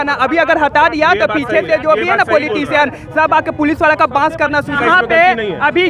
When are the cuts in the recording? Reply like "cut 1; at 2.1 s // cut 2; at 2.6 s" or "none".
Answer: cut 1; at 4.8 s